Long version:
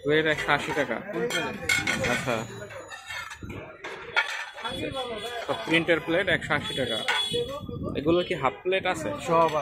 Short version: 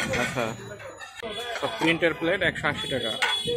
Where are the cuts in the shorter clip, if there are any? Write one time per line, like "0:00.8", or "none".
0:01.2